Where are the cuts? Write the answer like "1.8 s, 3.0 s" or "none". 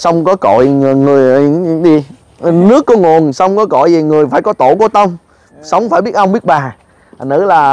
none

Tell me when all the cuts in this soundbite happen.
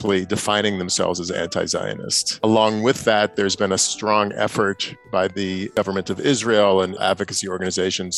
2.3 s, 5.7 s, 7.0 s

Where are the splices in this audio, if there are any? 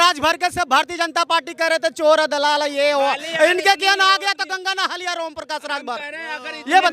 none

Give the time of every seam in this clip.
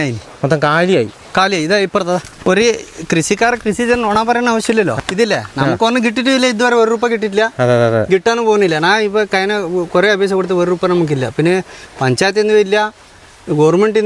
2.3 s, 5.0 s

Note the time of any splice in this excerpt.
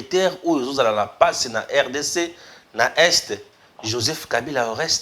none

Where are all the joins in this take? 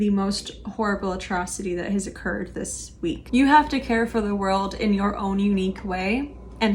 3.2 s

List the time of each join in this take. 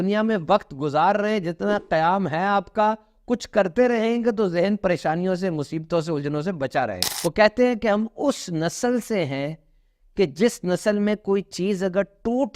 7.0 s

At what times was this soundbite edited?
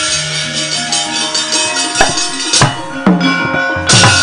none

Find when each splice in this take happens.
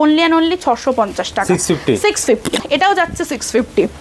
2.6 s

